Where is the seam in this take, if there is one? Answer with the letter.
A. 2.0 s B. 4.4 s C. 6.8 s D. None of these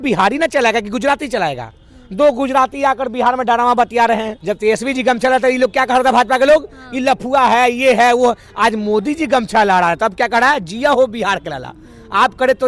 B